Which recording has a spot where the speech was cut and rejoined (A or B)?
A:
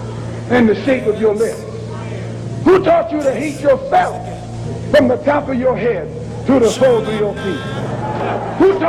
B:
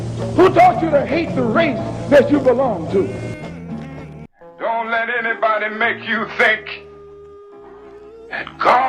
B